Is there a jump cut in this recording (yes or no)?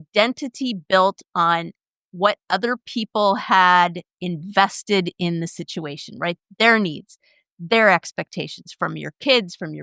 no